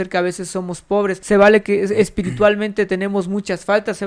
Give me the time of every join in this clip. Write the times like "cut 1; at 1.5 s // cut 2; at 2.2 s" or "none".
cut 1; at 1.2 s